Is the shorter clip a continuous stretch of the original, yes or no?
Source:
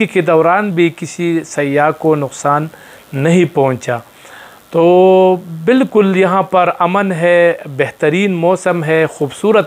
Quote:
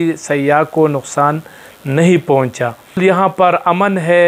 no